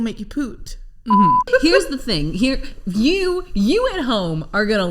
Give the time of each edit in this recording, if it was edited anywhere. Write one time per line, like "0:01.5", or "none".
0:01.5